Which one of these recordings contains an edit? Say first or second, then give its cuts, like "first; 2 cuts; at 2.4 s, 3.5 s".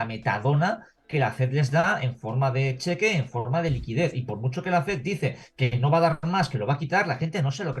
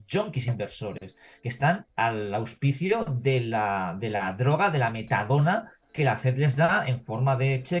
second; 1 cut; at 1.9 s